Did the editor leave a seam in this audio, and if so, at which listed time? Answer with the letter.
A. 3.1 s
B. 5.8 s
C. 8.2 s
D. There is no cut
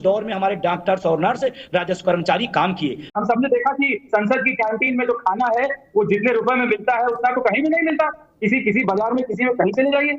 A